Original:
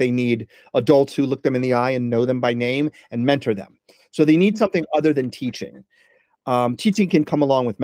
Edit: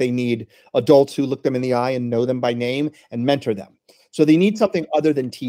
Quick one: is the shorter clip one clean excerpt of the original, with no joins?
yes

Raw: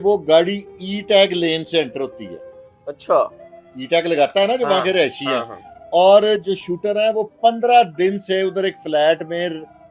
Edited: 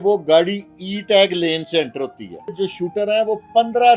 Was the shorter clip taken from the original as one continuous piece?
no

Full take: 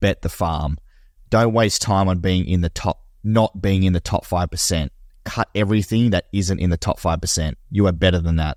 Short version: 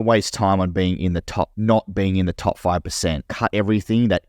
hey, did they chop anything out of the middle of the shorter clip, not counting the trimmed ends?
yes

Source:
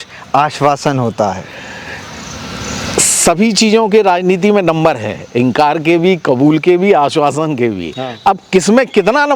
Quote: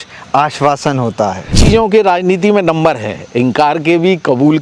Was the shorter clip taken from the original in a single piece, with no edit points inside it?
no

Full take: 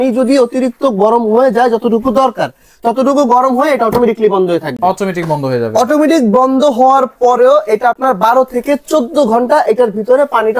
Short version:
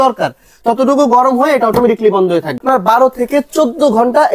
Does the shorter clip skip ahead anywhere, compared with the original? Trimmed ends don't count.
yes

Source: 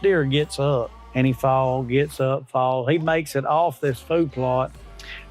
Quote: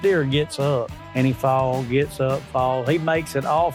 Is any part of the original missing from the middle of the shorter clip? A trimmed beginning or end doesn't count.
no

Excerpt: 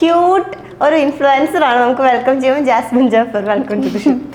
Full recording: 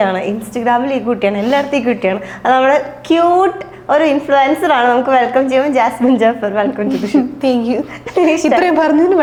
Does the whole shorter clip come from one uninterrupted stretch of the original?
yes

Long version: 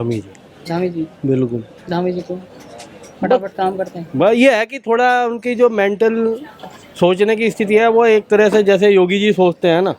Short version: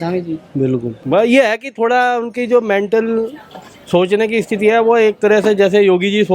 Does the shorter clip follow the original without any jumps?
no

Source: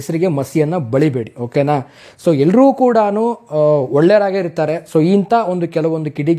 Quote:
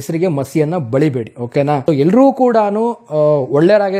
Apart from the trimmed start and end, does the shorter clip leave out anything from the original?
yes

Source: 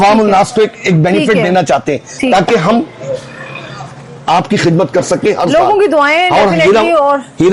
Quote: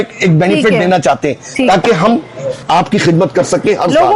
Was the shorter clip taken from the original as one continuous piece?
no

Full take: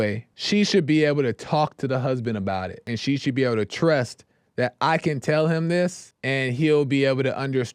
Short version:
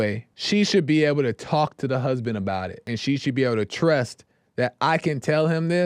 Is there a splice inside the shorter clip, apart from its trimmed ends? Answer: no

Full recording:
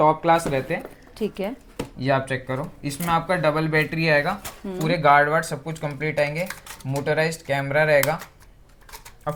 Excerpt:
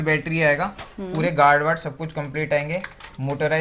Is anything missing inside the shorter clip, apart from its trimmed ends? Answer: no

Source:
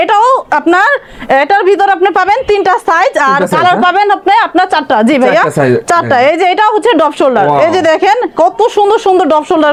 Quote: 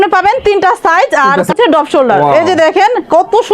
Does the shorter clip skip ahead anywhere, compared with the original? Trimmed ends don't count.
yes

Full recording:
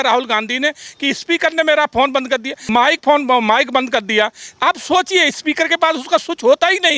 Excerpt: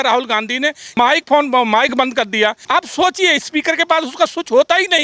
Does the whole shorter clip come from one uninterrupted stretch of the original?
no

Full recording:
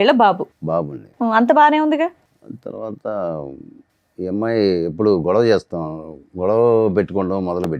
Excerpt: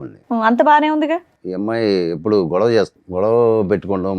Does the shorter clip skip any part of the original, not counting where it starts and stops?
yes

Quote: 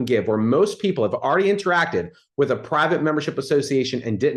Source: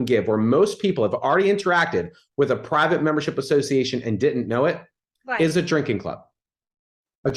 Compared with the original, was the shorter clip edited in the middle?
no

